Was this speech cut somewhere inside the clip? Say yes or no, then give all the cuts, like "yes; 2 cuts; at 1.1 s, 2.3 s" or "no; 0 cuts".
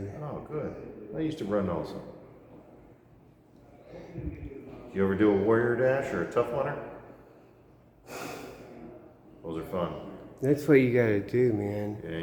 no; 0 cuts